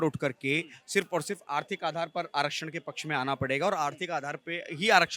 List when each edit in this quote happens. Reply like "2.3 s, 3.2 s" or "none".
none